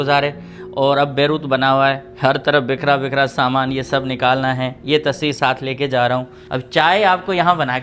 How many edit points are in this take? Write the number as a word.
one